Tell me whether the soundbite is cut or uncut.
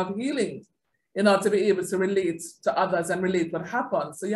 uncut